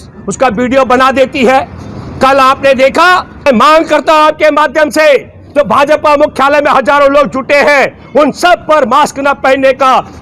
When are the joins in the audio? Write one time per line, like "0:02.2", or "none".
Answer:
0:03.5